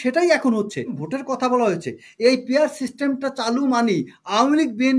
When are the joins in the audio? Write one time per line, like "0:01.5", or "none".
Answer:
0:01.0